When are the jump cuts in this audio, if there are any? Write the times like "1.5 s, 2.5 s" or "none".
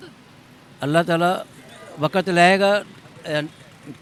none